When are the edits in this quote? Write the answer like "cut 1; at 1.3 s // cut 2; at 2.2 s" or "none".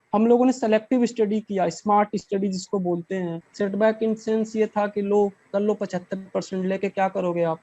cut 1; at 3.4 s